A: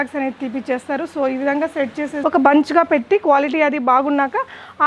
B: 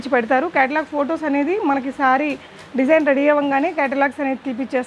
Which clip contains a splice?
A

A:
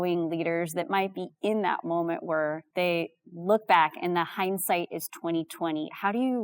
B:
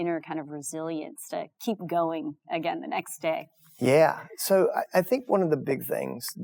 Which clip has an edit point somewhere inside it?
A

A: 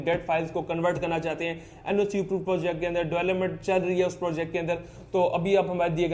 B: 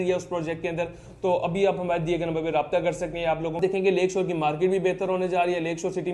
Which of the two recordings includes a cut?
B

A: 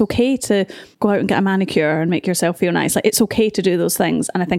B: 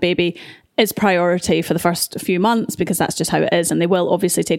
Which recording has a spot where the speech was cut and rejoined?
A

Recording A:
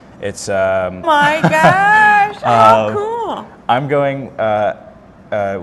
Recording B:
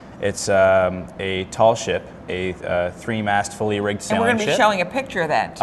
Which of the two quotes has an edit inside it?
B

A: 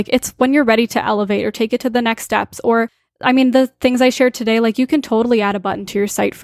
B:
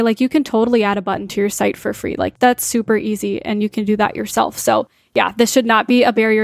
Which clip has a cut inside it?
A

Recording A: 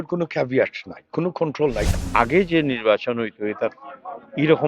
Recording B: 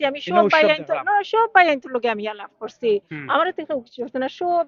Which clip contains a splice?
A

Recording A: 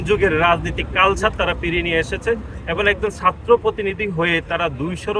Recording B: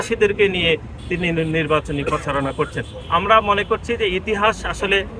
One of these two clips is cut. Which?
B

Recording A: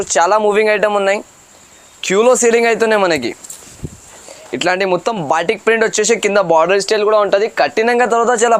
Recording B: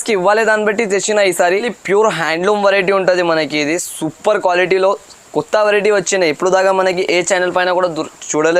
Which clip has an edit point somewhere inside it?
B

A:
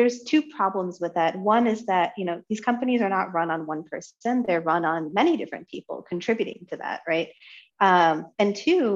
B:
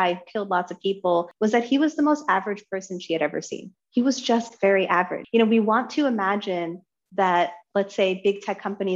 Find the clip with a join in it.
B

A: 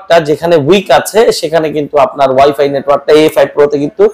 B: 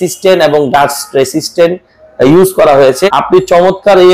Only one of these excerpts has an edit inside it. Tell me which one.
B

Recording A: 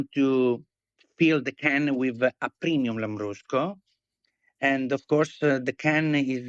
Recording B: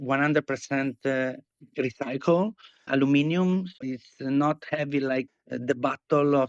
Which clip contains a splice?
B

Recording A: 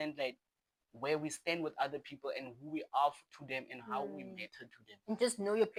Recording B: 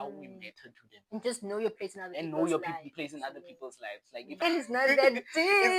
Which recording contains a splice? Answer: B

